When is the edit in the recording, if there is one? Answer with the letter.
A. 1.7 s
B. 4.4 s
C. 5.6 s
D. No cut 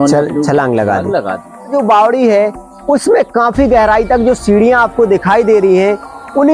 A